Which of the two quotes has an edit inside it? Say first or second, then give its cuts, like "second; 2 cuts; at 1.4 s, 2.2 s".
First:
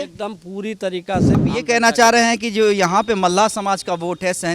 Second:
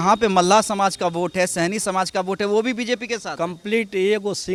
first; 1 cut; at 1.4 s